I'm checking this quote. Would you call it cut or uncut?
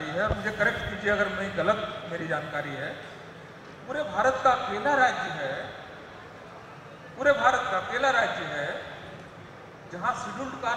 uncut